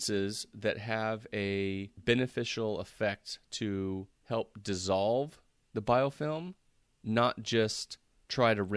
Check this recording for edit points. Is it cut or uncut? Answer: cut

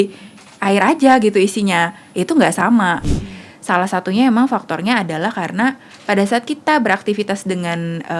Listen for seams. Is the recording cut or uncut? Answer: cut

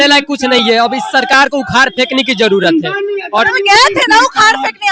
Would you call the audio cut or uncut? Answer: uncut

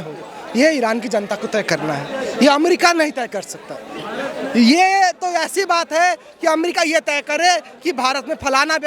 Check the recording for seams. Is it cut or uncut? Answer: uncut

